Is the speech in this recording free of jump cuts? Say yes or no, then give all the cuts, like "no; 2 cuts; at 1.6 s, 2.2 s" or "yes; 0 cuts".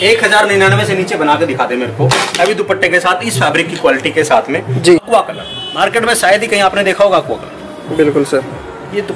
no; 1 cut; at 5.0 s